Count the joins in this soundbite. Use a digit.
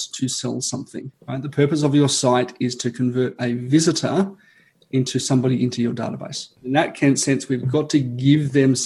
2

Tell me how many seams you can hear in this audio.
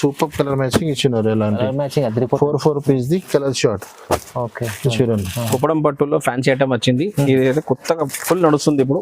1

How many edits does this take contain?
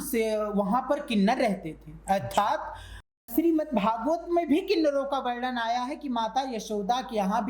1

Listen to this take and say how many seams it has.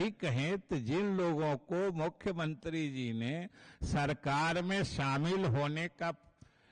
0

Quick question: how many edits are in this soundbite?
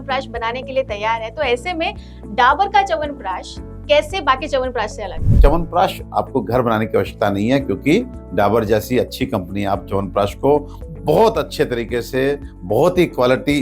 1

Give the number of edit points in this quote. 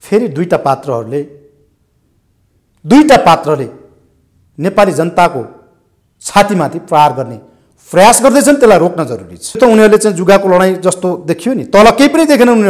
1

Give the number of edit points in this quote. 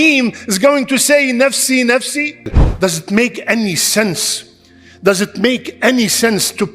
1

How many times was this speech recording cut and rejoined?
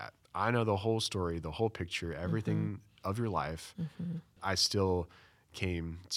1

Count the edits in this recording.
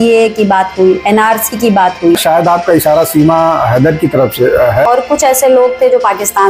2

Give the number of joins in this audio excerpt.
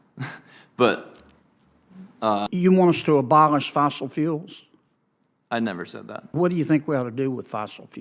2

